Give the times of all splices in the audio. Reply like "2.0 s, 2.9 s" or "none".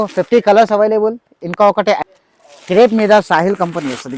2.0 s